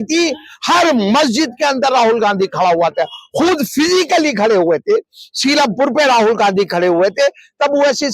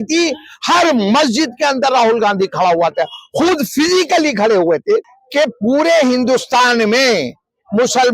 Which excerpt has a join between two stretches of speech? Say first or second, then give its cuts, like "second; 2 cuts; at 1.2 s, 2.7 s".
second; 1 cut; at 5.2 s